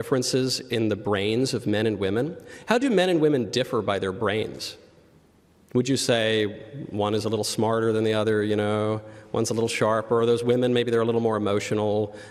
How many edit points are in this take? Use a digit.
0